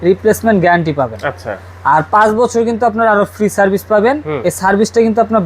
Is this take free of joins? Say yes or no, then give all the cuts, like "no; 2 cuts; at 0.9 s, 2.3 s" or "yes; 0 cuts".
yes; 0 cuts